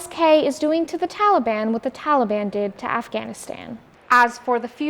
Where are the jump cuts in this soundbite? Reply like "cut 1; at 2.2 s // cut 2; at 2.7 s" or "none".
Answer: cut 1; at 3.8 s